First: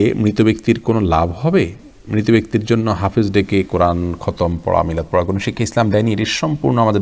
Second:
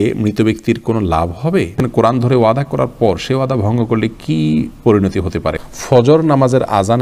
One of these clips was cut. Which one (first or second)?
second